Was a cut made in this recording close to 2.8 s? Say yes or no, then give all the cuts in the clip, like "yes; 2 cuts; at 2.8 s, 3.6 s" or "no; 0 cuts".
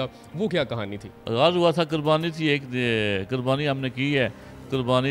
no; 1 cut; at 1.1 s